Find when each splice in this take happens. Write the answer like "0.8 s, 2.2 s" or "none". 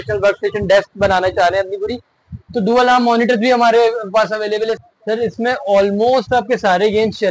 4.7 s